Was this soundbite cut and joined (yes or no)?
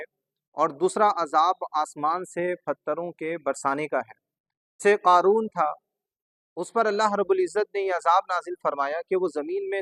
yes